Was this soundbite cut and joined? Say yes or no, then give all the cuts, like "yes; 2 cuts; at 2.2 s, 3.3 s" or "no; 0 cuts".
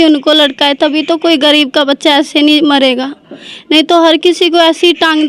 no; 0 cuts